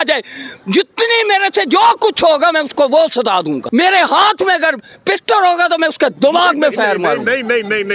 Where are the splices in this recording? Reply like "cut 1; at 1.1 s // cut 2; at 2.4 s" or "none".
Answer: cut 1; at 3.6 s